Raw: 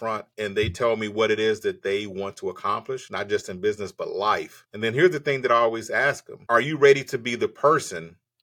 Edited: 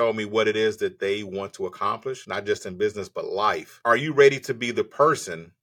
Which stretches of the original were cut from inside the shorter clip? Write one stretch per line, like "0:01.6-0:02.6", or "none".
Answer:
0:04.5-0:06.3